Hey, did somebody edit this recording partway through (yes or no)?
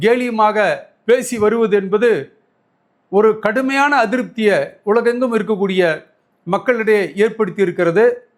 no